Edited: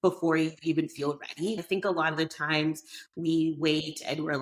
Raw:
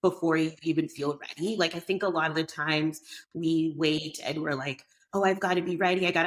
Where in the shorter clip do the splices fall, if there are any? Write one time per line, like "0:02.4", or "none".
0:01.6